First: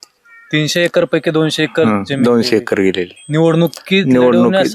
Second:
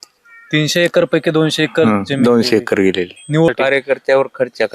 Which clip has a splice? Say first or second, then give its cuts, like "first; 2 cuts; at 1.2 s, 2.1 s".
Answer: second; 1 cut; at 3.5 s